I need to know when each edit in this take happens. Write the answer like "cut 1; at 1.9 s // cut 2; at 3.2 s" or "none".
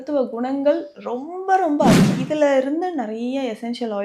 cut 1; at 2.1 s